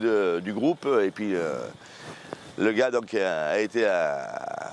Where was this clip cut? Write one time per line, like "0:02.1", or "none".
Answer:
none